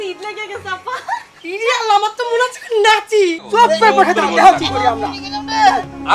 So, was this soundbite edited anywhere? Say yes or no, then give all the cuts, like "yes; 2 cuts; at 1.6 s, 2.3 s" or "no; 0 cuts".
yes; 1 cut; at 3.5 s